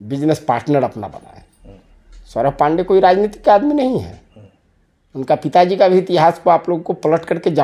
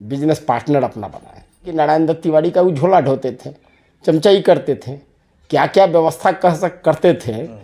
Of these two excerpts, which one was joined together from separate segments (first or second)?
second